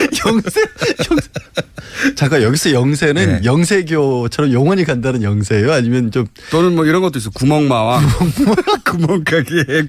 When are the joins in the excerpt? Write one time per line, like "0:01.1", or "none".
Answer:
0:05.8

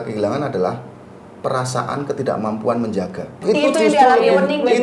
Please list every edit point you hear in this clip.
0:03.4

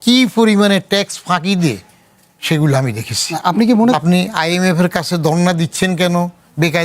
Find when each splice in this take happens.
0:03.9

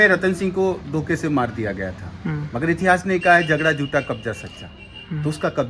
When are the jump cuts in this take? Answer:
none

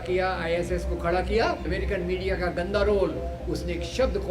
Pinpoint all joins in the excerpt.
0:01.7

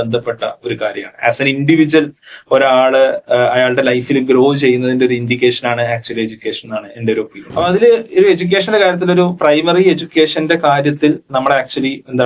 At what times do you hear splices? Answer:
0:07.4

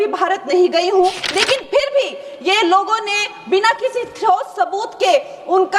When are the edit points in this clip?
0:01.2

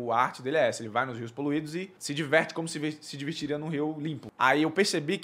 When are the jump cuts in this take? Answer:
0:02.0
0:04.2

